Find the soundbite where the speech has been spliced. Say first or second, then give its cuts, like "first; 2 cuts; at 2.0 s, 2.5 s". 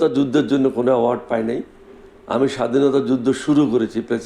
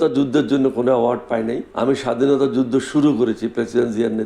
second; 1 cut; at 1.7 s